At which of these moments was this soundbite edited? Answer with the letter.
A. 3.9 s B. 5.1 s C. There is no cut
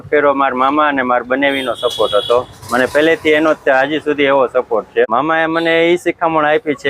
B